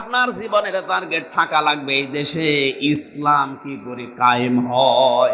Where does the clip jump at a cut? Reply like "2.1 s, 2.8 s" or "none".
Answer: none